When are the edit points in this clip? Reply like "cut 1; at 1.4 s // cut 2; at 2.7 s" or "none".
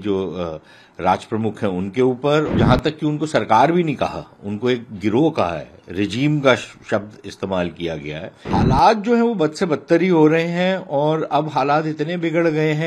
cut 1; at 2.5 s // cut 2; at 8.5 s